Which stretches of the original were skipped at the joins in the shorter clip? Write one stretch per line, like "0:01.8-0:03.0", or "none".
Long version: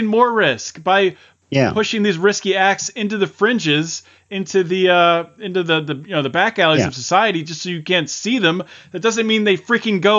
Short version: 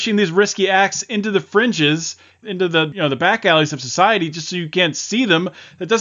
0:04.5-0:05.7

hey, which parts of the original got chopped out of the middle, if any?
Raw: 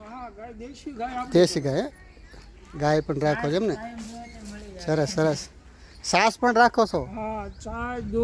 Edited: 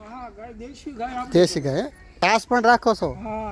0:02.0-0:05.9

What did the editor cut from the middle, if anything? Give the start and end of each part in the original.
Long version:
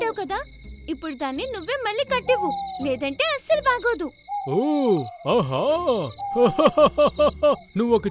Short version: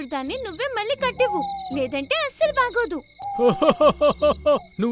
0:04.3-0:06.1

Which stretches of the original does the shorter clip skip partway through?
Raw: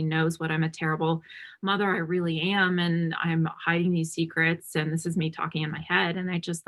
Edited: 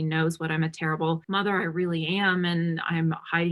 0:01.2-0:01.6

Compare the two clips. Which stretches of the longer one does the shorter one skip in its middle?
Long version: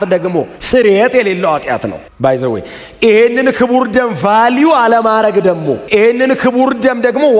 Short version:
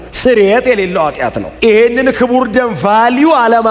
0:01.9-0:02.8

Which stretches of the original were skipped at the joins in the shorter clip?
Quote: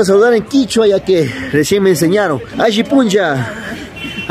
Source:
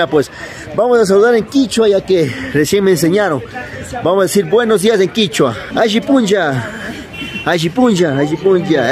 0:03.5-0:05.6

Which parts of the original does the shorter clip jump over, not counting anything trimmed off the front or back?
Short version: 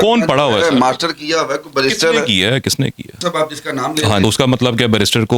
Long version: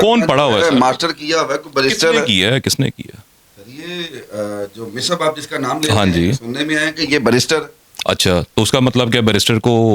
0:03.1-0:04.9
0:06.1-0:08.6

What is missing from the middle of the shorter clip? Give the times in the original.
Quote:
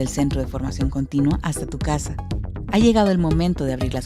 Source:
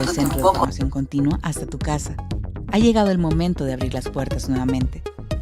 none

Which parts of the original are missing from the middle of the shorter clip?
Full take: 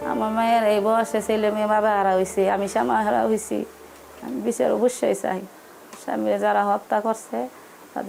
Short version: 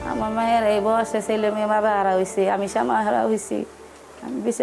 none

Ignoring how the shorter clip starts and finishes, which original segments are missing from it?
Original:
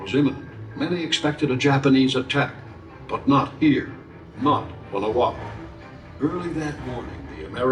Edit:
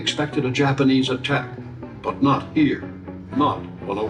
none

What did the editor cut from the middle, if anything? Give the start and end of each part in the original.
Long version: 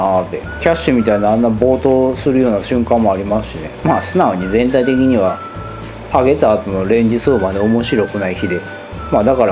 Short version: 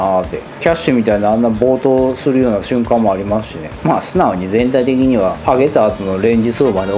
0:05.4-0:06.0

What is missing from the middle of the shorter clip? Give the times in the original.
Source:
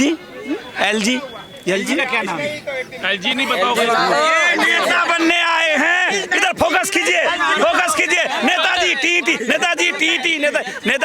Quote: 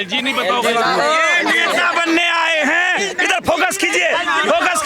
none

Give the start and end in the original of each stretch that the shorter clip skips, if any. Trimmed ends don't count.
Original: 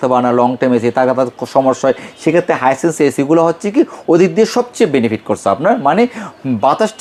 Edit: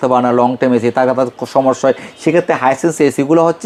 none

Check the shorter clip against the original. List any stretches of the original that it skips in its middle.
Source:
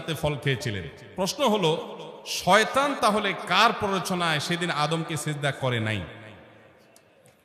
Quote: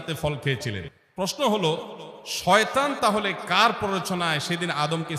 none

